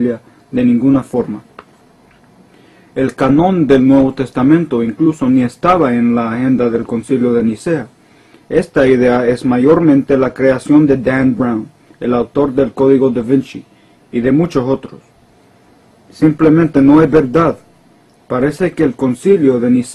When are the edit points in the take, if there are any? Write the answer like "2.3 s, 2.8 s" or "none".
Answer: none